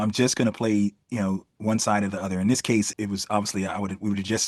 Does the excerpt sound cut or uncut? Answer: cut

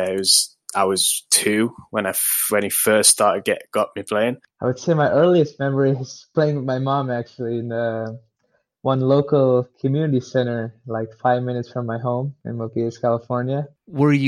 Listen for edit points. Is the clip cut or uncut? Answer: uncut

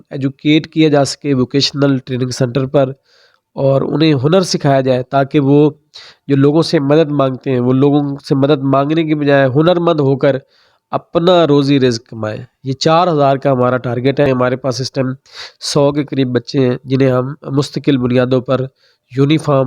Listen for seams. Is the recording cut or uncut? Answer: cut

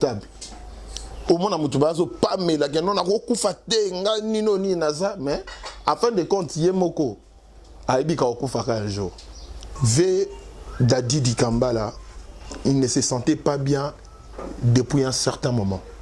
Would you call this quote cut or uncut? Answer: cut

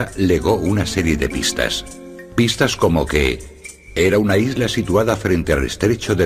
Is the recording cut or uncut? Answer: uncut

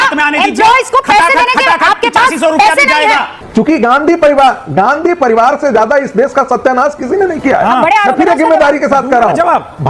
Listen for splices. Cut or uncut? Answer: cut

